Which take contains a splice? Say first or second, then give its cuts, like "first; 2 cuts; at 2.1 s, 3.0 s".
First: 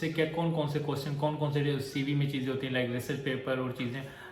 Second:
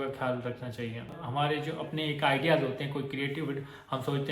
second; 1 cut; at 1.1 s